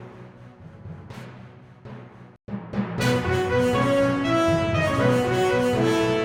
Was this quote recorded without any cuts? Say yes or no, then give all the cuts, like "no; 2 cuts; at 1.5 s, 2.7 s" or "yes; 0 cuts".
yes; 0 cuts